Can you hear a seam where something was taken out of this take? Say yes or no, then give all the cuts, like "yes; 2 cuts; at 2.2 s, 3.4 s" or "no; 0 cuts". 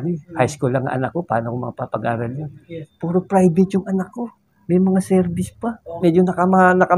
yes; 2 cuts; at 2.8 s, 5.9 s